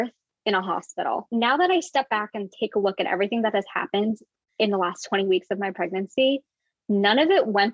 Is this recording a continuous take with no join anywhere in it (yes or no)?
no